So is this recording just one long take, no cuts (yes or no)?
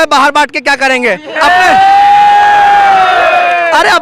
yes